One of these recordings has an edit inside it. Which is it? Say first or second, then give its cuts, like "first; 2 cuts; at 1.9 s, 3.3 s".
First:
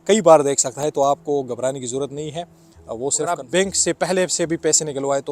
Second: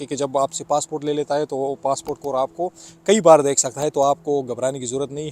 first; 1 cut; at 3.3 s